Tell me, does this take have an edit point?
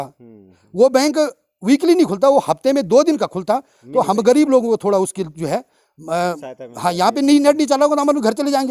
no; 0 cuts

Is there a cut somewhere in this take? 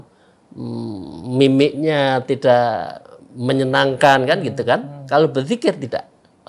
no; 0 cuts

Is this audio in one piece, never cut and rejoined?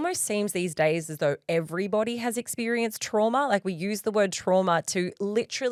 yes; 0 cuts

